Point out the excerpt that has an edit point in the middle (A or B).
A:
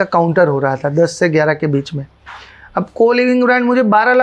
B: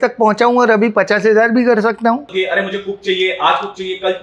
B